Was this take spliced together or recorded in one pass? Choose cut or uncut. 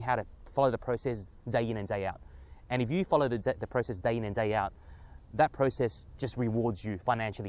uncut